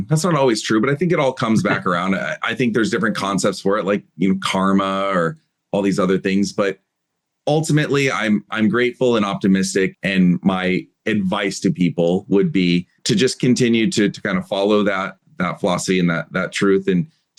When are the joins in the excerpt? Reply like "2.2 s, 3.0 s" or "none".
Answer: none